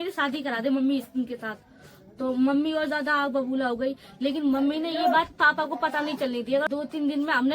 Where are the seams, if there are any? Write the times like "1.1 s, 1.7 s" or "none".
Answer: 6.7 s